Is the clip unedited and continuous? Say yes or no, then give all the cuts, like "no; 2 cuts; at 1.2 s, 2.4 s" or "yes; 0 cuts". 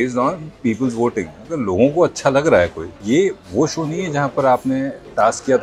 no; 1 cut; at 2.9 s